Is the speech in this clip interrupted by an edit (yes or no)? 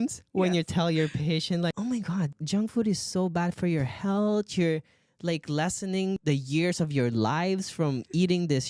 yes